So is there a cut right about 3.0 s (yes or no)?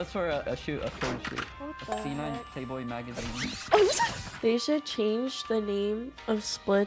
no